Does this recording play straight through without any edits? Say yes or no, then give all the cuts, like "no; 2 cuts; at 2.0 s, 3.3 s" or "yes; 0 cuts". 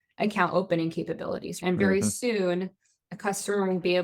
no; 1 cut; at 1.6 s